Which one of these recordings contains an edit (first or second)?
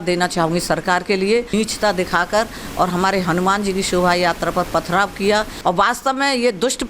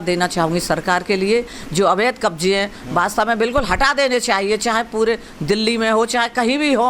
first